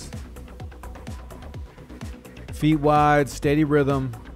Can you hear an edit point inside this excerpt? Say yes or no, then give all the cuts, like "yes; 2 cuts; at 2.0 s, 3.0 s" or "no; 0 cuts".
no; 0 cuts